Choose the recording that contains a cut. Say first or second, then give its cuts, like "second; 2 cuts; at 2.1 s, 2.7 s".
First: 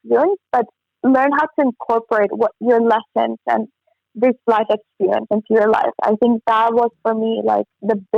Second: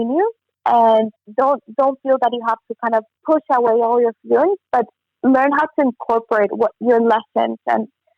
second; 2 cuts; at 1.2 s, 3.1 s